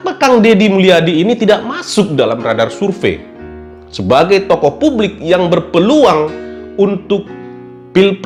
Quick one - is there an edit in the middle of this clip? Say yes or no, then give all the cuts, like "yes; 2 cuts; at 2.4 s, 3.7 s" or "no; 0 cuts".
no; 0 cuts